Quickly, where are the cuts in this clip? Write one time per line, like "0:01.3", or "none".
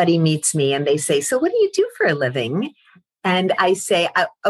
none